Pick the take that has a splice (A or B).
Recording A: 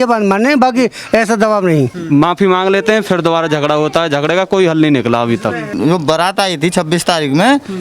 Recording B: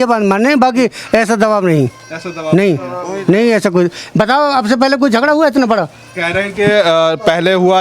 A